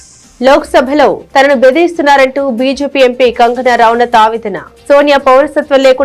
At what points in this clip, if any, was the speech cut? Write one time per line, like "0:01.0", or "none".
none